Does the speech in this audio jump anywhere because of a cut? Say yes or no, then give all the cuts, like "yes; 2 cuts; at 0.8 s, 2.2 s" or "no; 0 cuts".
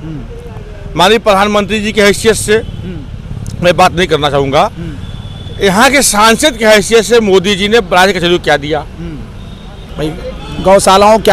yes; 1 cut; at 9.8 s